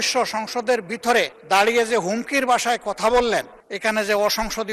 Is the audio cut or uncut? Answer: cut